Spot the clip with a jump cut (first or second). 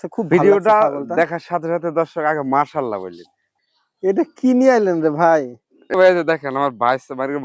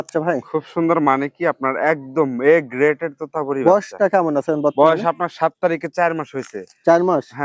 first